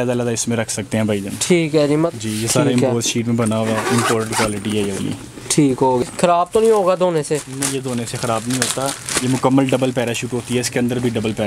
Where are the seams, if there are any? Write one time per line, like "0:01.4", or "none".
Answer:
0:02.1
0:06.0